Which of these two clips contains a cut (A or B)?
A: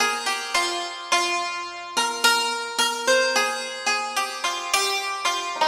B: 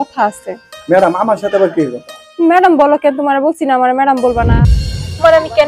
B